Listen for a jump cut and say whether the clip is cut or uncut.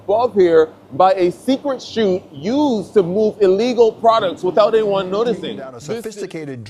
cut